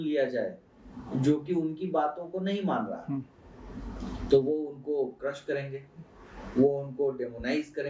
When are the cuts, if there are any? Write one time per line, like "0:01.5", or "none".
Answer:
none